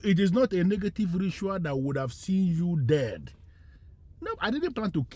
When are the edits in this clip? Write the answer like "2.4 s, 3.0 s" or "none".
none